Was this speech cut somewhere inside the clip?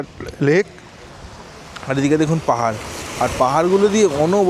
no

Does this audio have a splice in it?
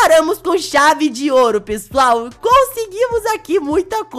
no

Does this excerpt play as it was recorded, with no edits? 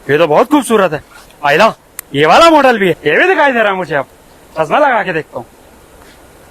no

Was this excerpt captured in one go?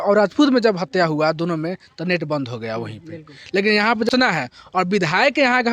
no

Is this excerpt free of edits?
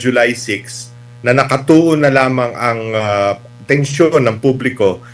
yes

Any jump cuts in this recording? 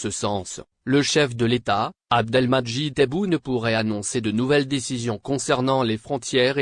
yes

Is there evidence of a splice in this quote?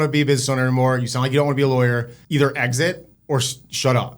yes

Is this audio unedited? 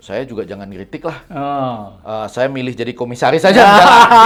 yes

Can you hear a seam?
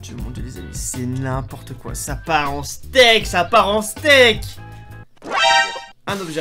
no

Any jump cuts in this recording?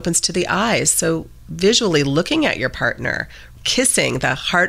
yes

